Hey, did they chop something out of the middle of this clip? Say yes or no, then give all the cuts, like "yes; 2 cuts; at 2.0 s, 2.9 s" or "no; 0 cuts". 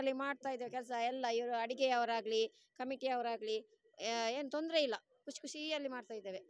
no; 0 cuts